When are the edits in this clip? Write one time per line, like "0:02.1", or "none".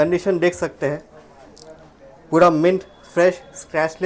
none

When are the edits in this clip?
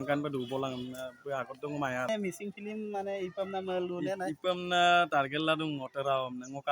0:02.1

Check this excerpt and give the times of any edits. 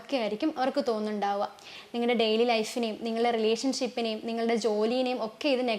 0:01.8

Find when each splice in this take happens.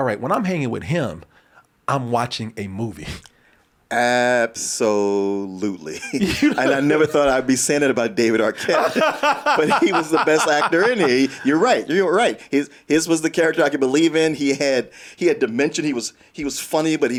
none

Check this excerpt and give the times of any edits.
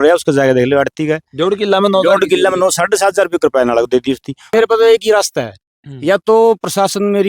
0:04.4

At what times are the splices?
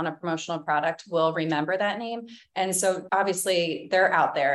0:03.0

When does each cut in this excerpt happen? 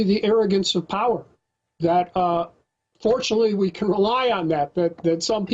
0:04.4

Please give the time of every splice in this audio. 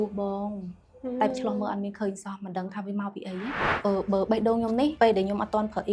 0:01.3
0:03.6
0:04.9

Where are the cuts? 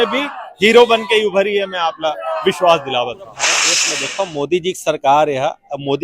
0:03.8

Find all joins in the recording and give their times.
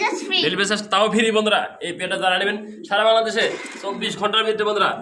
none

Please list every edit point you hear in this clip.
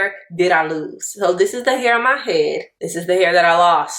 0:02.8

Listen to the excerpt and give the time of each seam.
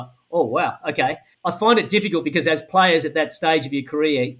0:01.3

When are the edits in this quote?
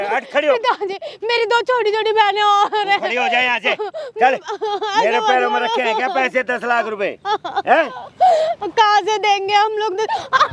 none

